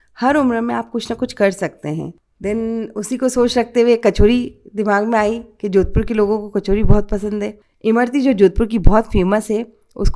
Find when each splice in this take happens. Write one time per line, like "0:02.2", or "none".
0:02.2
0:07.6